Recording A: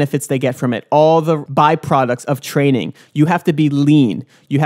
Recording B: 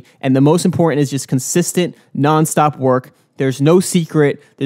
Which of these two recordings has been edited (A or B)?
A